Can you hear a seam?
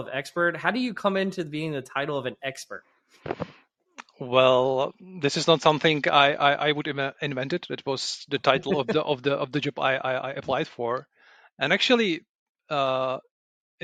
no; 0 cuts

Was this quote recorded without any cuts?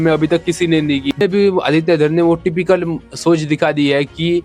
no; 1 cut; at 1.2 s

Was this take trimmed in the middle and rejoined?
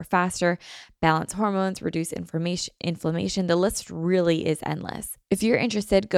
yes; 1 cut; at 5.1 s

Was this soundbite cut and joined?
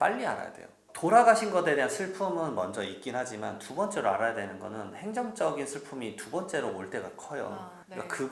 no; 0 cuts

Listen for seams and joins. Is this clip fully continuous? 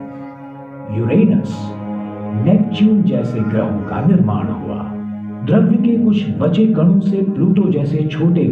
yes; 0 cuts

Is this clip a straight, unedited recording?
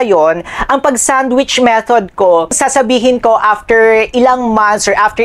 no; 1 cut; at 2.6 s

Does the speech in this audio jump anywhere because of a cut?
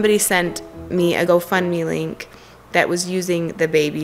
yes; 1 cut; at 1.3 s

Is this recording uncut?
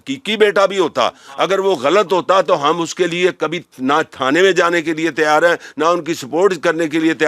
yes; 0 cuts

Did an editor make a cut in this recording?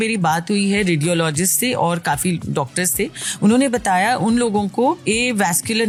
no; 0 cuts

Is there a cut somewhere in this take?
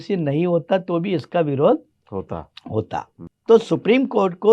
yes; 1 cut; at 3.2 s

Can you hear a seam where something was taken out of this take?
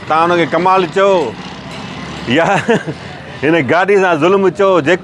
no; 0 cuts

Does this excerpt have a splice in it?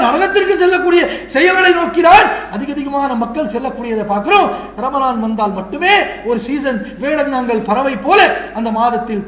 no; 0 cuts

